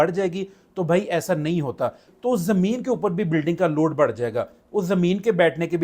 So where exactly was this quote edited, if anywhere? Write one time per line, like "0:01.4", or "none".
0:02.1